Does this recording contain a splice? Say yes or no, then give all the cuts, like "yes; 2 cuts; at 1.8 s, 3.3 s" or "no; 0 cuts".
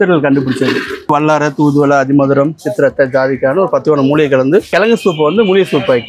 yes; 2 cuts; at 1.1 s, 4.7 s